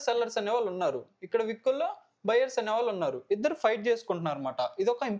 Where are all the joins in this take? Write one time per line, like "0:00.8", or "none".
none